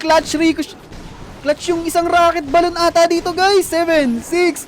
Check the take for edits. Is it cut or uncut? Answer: uncut